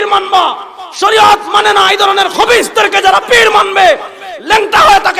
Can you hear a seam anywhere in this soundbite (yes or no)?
no